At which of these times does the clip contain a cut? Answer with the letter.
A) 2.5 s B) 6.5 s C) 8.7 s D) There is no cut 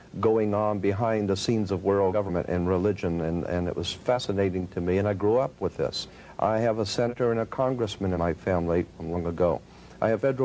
D